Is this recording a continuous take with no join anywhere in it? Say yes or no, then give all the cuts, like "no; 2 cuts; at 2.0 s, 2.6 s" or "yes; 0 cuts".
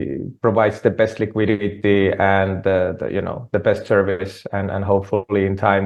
yes; 0 cuts